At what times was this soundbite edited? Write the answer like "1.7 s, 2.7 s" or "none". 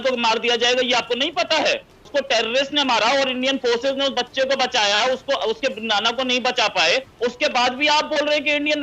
1.9 s, 7.1 s